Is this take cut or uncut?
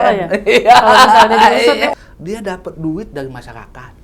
cut